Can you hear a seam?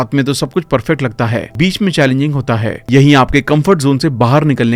no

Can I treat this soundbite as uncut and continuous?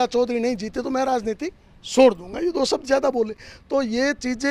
yes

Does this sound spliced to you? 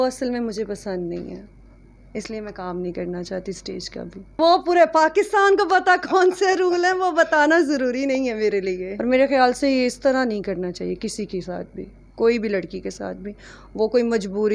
yes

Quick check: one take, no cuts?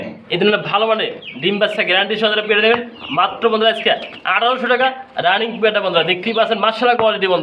yes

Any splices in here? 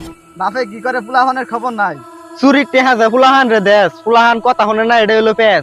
no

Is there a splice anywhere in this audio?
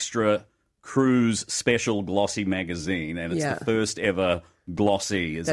no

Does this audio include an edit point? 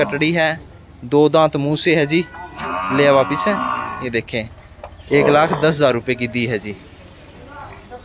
no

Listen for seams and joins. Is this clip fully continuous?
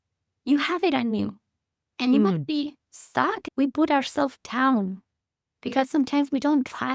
no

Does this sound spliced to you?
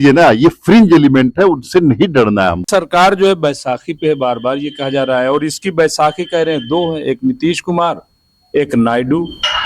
yes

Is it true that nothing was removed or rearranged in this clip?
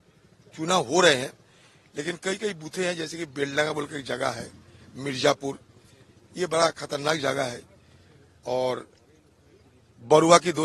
yes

